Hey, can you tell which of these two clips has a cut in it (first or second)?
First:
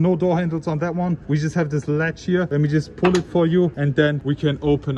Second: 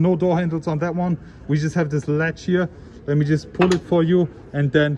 first